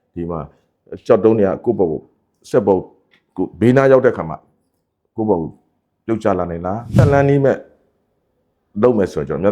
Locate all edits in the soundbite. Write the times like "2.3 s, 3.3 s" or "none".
6.9 s